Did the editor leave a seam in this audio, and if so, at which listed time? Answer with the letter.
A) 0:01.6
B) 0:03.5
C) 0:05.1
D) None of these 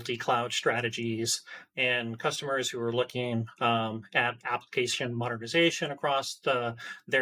D